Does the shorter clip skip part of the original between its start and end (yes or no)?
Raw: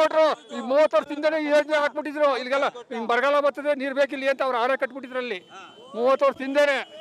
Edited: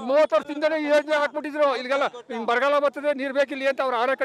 no